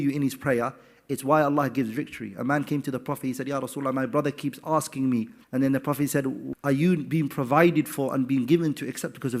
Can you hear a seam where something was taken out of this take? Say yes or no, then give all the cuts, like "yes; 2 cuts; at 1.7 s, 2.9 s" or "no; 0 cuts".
yes; 1 cut; at 6.5 s